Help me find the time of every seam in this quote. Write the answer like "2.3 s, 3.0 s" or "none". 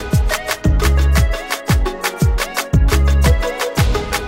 none